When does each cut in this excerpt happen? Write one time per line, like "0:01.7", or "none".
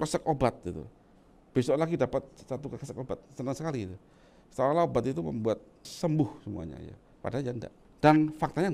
0:05.9
0:07.8